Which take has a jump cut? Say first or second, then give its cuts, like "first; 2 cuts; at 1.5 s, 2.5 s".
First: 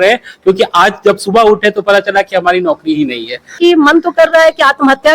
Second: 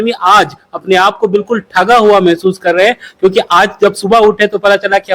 first; 1 cut; at 3.6 s